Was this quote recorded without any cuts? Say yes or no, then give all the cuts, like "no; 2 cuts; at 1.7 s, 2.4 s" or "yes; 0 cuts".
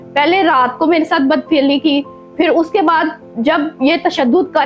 yes; 0 cuts